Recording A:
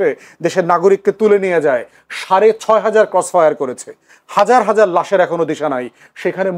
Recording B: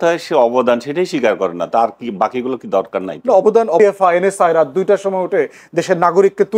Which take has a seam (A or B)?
B